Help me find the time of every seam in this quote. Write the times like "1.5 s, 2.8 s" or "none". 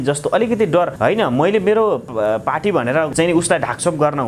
0.9 s, 3.1 s